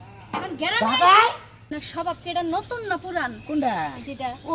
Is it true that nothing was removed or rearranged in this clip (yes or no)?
no